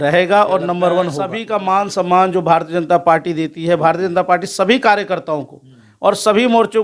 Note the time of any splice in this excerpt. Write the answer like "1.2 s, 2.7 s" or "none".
1.4 s